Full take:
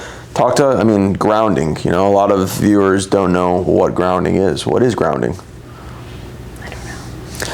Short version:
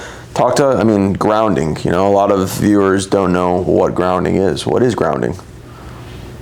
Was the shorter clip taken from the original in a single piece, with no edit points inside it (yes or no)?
yes